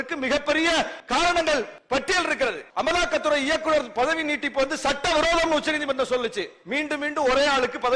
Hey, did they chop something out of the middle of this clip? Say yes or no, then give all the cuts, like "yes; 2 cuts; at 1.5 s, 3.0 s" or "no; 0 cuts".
yes; 3 cuts; at 1.0 s, 1.8 s, 2.6 s